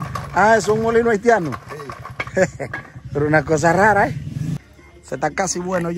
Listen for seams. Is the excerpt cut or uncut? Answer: cut